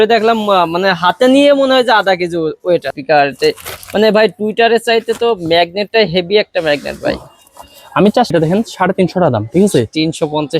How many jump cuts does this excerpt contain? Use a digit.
2